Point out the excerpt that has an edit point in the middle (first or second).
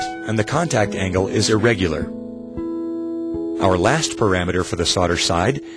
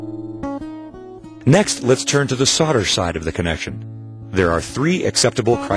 first